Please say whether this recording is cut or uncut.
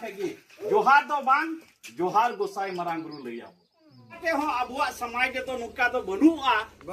cut